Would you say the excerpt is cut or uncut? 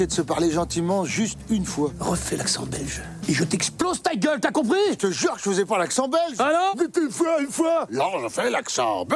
cut